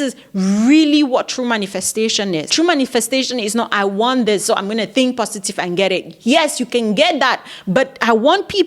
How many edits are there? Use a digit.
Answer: 1